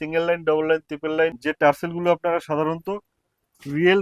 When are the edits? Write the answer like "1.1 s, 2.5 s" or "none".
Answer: 1.4 s